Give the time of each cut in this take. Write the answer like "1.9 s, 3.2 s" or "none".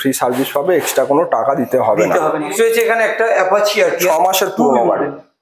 2.5 s